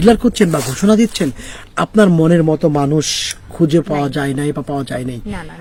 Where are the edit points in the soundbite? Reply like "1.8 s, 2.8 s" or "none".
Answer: none